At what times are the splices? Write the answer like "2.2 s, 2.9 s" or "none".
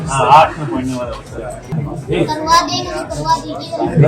1.7 s